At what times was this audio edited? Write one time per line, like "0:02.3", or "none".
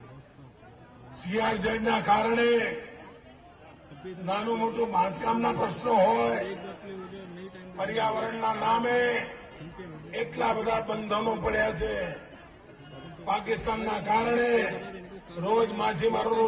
0:02.0